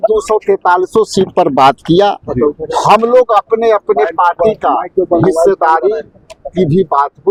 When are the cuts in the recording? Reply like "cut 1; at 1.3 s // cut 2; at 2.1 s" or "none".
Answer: none